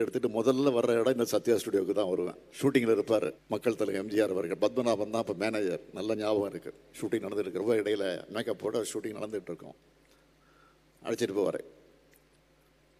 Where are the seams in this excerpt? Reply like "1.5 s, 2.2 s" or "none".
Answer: 2.4 s, 3.4 s, 7.0 s